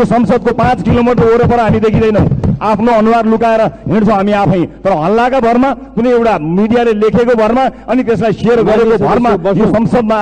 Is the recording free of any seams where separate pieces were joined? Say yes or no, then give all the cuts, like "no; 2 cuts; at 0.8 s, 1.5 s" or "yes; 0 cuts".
yes; 0 cuts